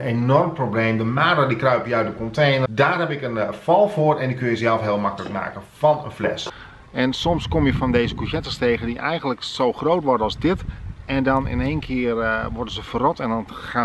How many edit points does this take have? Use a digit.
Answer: 2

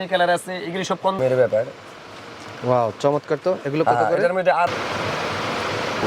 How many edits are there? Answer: 2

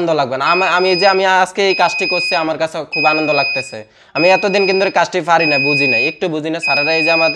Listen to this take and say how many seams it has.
0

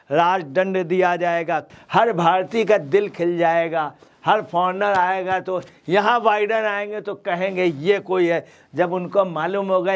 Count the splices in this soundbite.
1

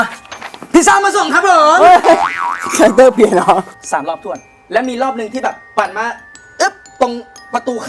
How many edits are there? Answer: 1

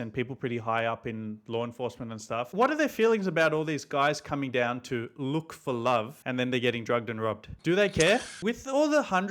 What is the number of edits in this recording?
3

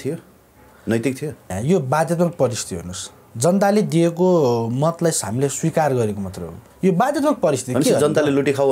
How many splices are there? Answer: 1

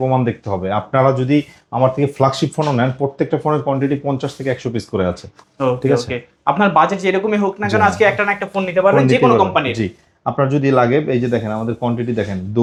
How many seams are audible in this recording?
0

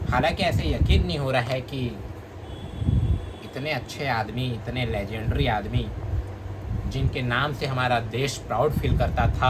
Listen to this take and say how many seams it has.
0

